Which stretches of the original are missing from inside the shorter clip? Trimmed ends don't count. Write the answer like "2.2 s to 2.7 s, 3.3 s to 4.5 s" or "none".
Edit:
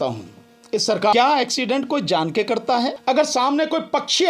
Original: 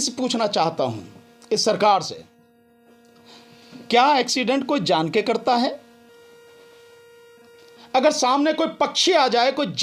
1.9 s to 3.9 s, 5.8 s to 7.8 s